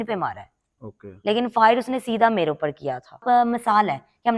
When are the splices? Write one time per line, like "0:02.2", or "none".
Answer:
0:03.2